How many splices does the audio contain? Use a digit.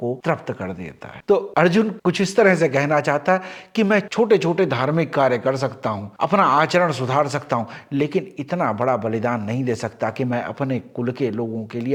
0